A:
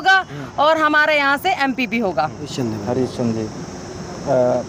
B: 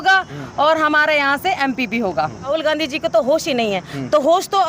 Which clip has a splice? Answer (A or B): B